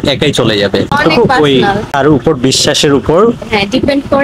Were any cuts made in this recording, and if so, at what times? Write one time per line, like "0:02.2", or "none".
0:01.0
0:02.0